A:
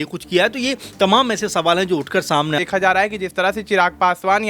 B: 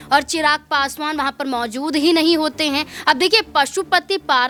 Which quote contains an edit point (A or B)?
A